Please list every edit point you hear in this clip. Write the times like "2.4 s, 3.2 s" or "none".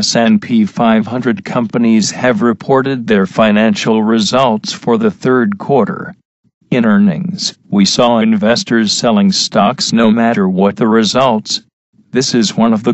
none

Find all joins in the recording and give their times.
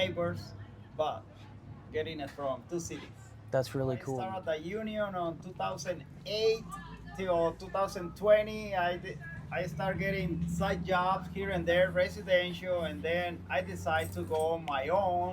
4.2 s

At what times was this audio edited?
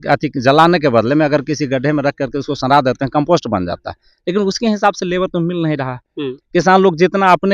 none

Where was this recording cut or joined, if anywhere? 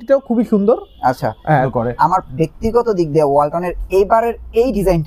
1.7 s

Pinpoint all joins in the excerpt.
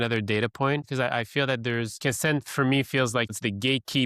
0.9 s, 2.0 s, 3.3 s

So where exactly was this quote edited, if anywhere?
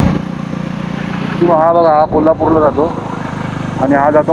none

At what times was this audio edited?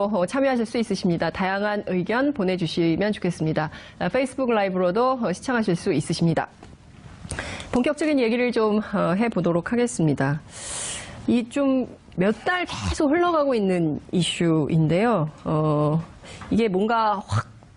none

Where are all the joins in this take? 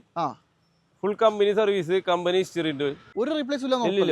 3.0 s

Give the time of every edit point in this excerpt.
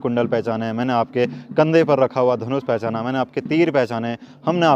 none

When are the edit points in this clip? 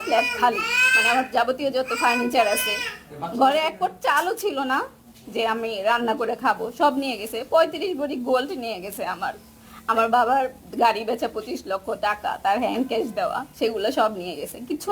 none

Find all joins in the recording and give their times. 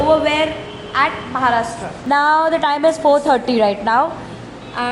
1.9 s

